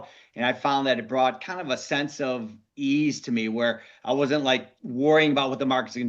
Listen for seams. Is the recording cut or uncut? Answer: uncut